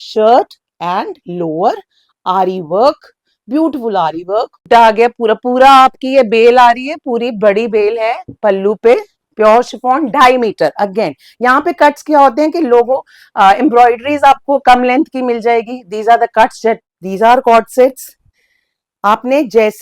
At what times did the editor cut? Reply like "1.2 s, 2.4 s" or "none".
4.6 s, 16.9 s